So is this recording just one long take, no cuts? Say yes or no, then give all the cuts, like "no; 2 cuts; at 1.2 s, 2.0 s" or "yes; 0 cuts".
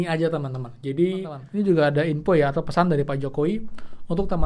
no; 1 cut; at 1.4 s